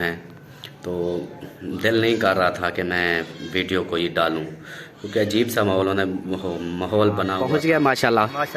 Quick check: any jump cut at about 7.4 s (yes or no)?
yes